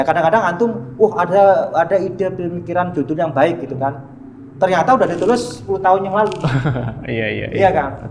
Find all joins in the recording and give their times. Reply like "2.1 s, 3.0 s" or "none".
none